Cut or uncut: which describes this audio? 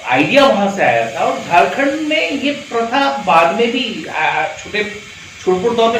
uncut